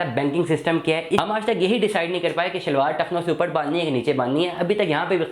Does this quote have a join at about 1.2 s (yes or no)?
yes